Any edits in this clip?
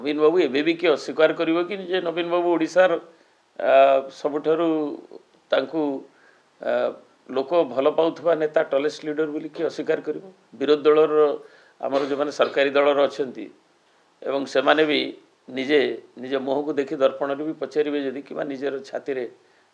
no; 0 cuts

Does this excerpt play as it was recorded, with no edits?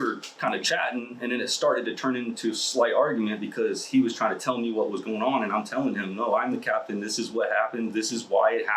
yes; 0 cuts

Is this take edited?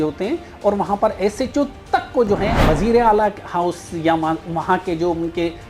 yes; 1 cut; at 2.6 s

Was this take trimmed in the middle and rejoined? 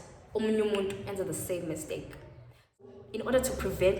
yes; 1 cut; at 2.8 s

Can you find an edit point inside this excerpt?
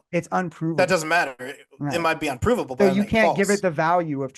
no; 0 cuts

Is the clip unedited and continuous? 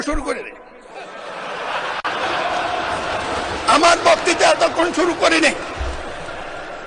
yes; 0 cuts

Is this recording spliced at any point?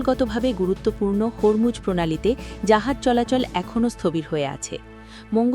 no; 0 cuts

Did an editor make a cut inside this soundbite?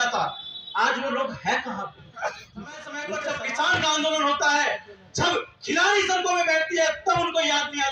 yes; 1 cut; at 3.0 s

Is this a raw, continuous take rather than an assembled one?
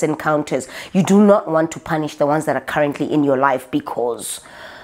yes; 0 cuts

